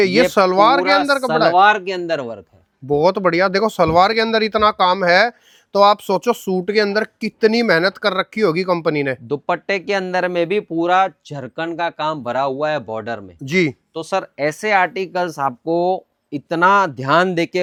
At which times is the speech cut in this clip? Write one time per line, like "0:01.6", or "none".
none